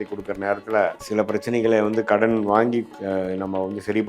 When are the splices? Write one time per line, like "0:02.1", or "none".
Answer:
0:01.0
0:02.9